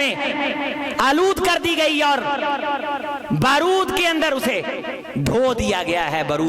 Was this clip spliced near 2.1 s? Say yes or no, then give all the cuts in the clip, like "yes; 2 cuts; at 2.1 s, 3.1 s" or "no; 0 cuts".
no; 1 cut; at 4.9 s